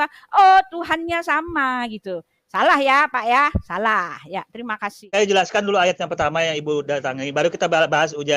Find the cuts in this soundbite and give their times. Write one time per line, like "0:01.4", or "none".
0:05.0